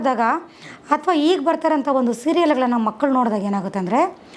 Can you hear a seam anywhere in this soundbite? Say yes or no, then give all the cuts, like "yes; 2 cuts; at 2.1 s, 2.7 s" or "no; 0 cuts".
no; 0 cuts